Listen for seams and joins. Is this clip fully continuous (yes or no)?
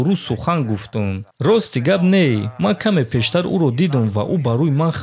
no